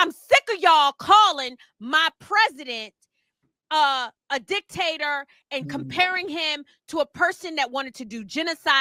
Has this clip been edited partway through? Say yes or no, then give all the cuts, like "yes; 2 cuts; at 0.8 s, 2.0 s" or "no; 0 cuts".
no; 0 cuts